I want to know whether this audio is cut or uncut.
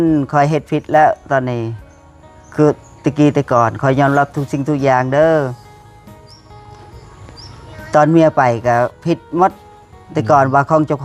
uncut